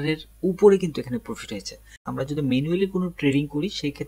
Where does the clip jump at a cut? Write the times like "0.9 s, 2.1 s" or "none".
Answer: 2.0 s

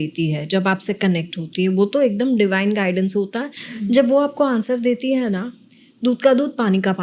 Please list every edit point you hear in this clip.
none

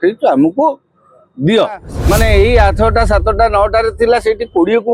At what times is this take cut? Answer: 1.9 s

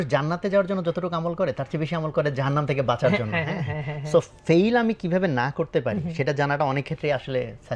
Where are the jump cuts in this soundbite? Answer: none

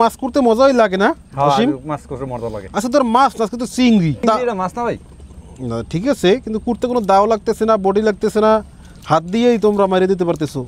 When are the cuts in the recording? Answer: none

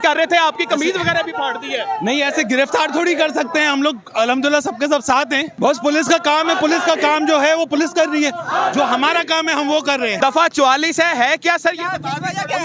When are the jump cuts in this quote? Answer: 5.5 s, 10.2 s

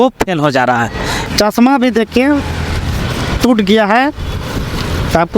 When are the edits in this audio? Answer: 1.3 s

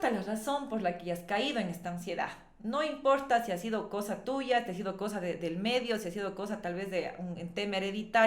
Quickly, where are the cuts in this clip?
none

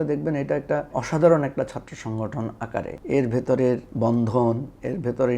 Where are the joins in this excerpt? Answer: 0.9 s, 3.0 s, 3.9 s

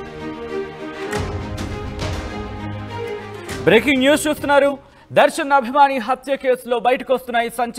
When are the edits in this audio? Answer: 1.7 s

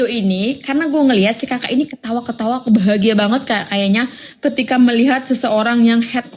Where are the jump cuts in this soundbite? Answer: none

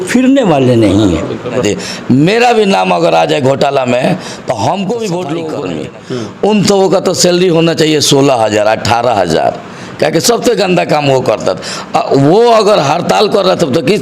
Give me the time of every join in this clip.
1.6 s, 5.9 s

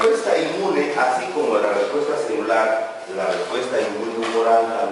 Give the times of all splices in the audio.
1.4 s

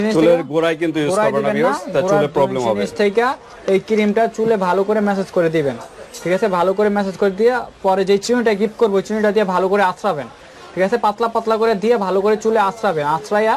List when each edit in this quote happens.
none

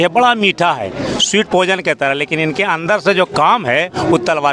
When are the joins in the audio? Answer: none

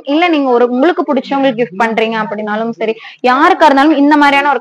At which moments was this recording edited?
none

